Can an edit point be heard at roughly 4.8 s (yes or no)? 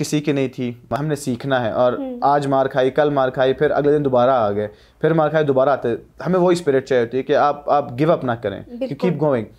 no